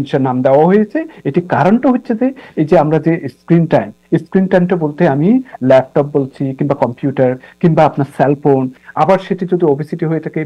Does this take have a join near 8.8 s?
yes; 1 cut; at 8.8 s

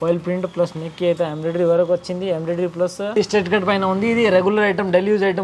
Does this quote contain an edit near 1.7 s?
no; 1 cut; at 3.1 s

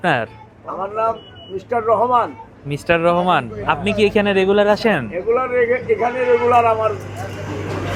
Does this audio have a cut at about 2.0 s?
no; 0 cuts

